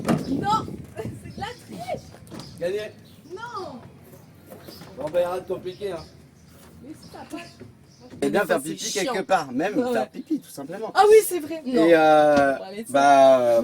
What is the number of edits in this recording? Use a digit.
1